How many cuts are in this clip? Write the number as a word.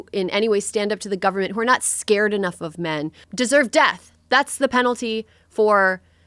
one